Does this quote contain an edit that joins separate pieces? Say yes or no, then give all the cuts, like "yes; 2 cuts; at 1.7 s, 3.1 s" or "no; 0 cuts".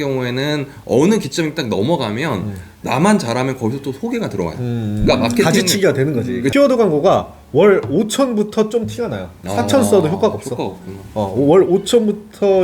yes; 1 cut; at 6.5 s